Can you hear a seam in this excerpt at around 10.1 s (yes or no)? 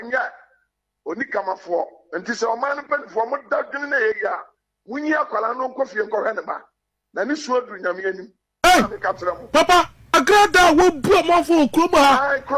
yes